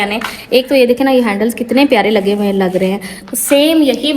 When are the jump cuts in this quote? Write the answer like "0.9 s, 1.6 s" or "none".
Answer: none